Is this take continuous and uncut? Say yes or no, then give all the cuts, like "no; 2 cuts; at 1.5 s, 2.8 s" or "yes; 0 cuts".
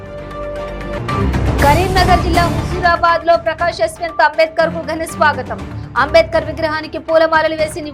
yes; 0 cuts